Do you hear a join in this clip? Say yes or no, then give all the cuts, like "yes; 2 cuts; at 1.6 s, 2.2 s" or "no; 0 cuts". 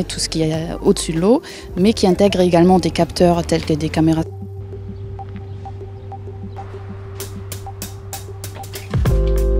no; 0 cuts